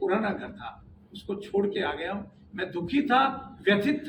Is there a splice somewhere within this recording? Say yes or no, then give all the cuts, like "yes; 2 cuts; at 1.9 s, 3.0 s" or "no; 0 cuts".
no; 0 cuts